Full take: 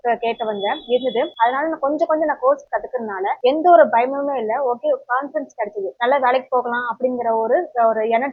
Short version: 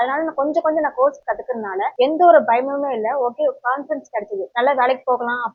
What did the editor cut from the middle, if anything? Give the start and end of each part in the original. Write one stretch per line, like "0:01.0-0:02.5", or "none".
none